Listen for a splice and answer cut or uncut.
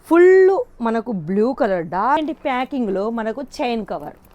cut